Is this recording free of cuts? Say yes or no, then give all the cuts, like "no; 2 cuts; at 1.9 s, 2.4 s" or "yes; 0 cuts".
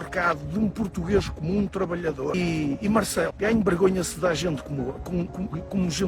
no; 2 cuts; at 2.3 s, 3.3 s